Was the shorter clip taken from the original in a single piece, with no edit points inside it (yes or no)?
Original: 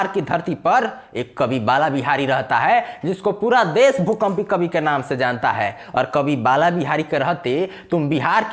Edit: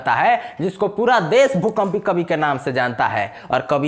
yes